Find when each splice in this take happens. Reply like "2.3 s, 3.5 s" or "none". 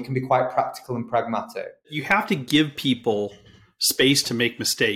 2.0 s